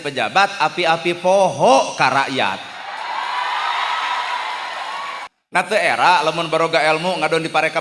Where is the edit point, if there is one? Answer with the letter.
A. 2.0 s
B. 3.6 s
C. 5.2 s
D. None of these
C